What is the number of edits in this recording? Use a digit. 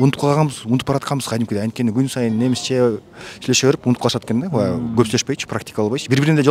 0